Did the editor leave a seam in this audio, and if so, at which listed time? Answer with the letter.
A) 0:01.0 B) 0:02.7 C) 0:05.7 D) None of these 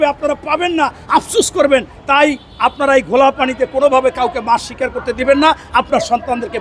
D